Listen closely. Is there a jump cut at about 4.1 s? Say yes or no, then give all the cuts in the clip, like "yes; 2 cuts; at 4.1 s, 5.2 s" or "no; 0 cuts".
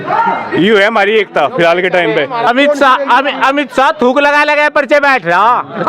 no; 1 cut; at 2.5 s